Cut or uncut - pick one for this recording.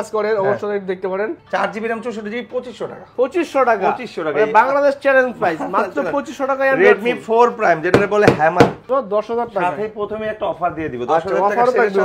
cut